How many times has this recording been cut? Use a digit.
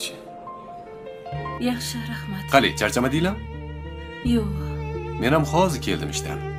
0